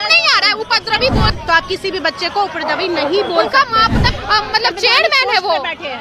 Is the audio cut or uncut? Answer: cut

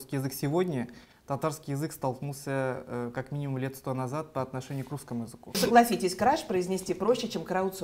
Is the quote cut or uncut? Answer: cut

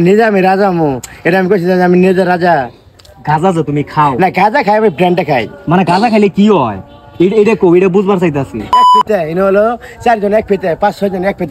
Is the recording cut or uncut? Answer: cut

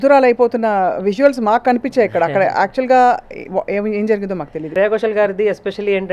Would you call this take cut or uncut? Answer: cut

